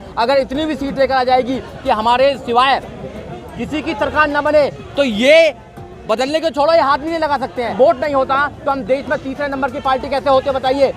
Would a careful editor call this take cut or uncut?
cut